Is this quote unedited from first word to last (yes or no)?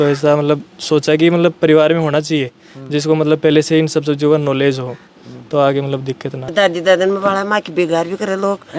no